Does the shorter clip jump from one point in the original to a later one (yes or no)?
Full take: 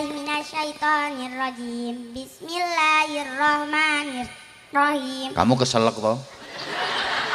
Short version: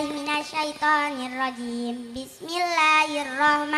no